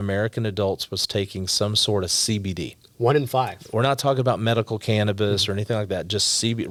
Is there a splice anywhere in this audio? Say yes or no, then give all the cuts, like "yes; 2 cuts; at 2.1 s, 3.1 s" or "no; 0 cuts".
no; 0 cuts